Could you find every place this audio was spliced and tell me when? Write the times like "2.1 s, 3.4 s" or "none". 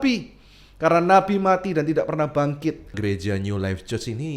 2.9 s